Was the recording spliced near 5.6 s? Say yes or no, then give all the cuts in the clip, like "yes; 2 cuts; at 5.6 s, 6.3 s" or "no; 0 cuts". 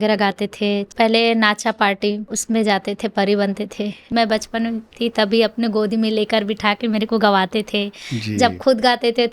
no; 3 cuts; at 0.9 s, 2.3 s, 4.1 s